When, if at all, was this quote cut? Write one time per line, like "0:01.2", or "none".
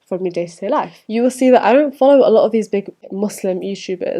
0:01.0
0:03.1